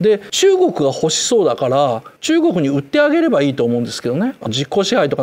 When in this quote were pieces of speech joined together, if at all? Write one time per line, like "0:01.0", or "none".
none